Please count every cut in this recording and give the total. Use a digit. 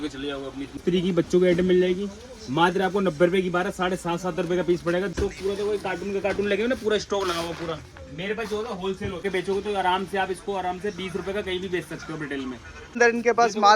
4